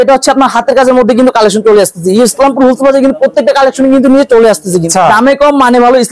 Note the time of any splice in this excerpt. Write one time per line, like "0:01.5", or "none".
0:04.9